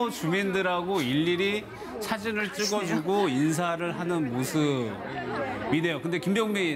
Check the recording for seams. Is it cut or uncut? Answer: uncut